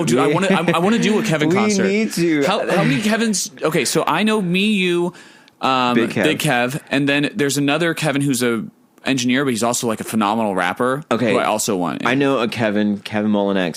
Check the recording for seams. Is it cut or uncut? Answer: uncut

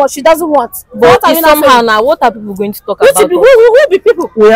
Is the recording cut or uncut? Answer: uncut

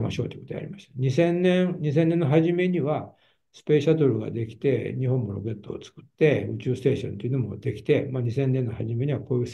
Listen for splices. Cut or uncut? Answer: uncut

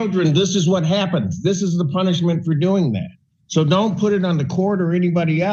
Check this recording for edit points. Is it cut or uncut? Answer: uncut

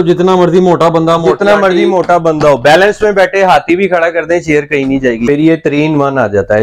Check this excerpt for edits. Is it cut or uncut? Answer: cut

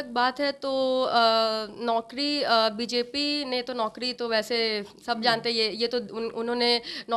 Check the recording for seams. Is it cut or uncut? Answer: uncut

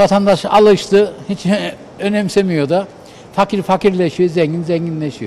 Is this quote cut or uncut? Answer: uncut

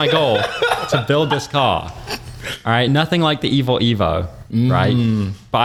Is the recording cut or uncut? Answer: uncut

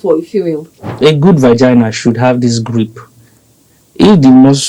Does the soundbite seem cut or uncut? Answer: cut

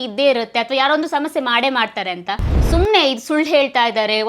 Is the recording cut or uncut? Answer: cut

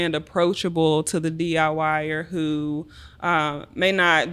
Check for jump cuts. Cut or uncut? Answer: uncut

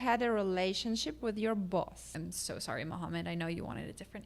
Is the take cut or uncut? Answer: cut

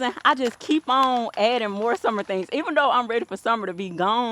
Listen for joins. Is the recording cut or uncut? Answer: uncut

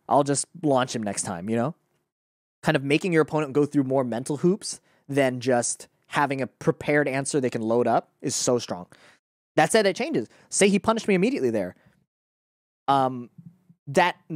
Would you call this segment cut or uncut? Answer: uncut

